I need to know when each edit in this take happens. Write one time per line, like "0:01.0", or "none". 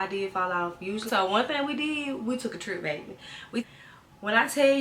0:01.0
0:03.6